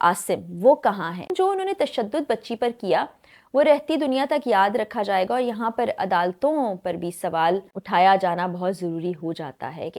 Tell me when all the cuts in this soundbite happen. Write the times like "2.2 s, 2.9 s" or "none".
1.3 s, 7.7 s